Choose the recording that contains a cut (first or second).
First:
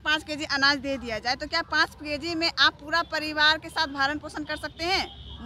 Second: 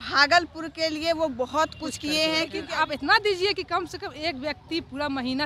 second